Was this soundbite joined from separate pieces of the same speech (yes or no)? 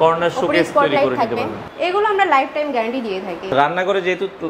yes